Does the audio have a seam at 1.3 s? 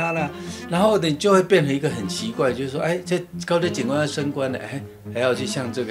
no; 0 cuts

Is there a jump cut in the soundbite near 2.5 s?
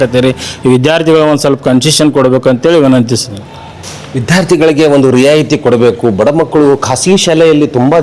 no; 0 cuts

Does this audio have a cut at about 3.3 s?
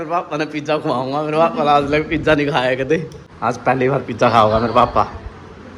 no; 0 cuts

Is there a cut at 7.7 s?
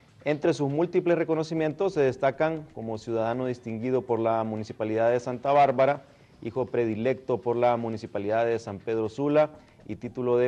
yes; 1 cut; at 7.7 s

